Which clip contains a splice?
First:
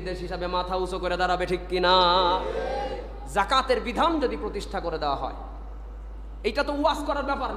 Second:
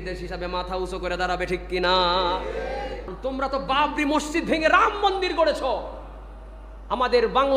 second; 1 cut; at 3.0 s

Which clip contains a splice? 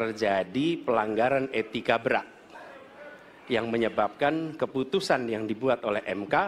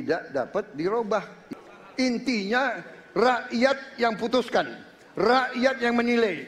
second; 1 cut; at 1.4 s

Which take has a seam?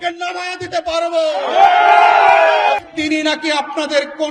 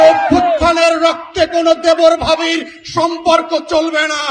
first; 1 cut; at 2.9 s

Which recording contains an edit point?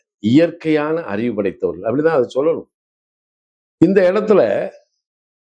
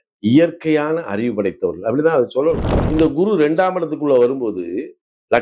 second; 1 cut; at 2.7 s

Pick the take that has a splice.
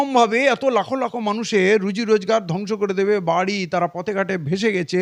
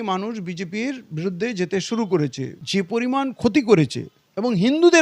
second; 1 cut; at 2.6 s

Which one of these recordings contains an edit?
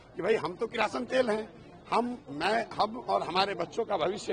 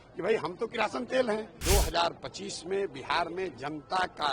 second; 1 cut; at 1.5 s

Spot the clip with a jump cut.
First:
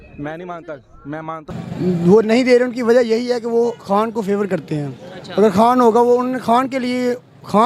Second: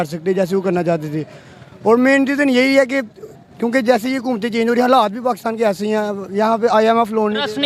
first; 1 cut; at 1.6 s

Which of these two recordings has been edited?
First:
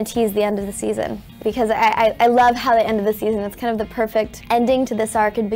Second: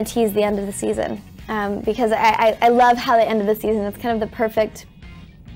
first; 2 cuts; at 1.4 s, 4.4 s

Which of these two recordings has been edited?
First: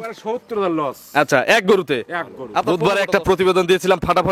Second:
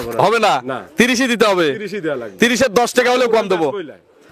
first; 1 cut; at 2.7 s

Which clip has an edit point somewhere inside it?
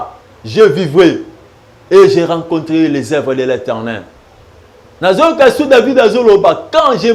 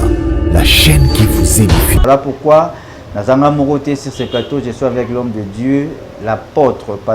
second; 1 cut; at 2.0 s

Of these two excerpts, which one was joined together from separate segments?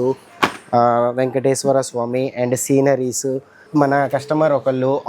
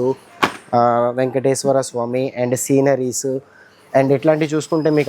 first; 1 cut; at 3.5 s

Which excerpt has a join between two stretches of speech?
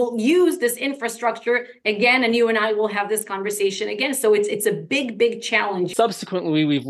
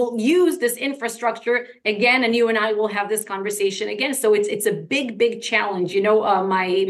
first; 1 cut; at 5.9 s

